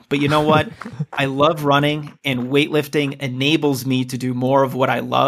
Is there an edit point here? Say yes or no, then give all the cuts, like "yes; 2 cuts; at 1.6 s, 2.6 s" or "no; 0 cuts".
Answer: no; 0 cuts